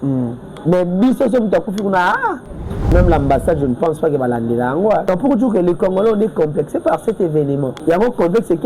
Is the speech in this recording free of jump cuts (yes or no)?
no